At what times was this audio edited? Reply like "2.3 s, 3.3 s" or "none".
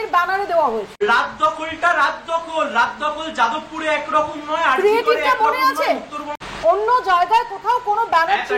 0.9 s, 6.2 s